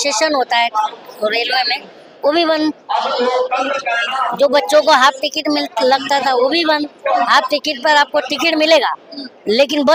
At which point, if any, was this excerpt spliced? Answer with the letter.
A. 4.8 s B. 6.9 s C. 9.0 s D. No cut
D